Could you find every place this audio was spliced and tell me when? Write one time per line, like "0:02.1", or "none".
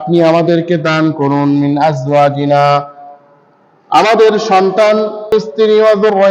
0:05.3